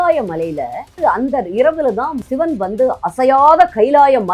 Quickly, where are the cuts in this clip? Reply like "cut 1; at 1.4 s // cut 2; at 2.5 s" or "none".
cut 1; at 0.9 s // cut 2; at 2.2 s